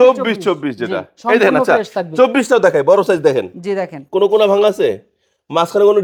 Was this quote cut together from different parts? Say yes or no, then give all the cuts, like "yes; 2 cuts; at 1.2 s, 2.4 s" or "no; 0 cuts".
no; 0 cuts